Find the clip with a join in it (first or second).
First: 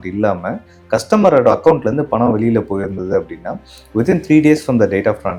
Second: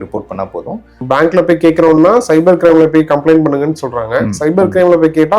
second